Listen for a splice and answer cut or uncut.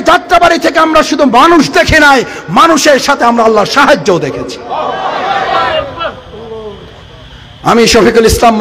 uncut